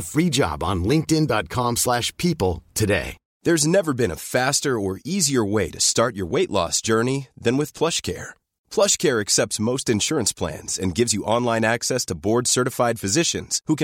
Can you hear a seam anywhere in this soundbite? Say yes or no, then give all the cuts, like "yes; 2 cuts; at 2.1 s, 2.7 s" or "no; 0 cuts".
no; 0 cuts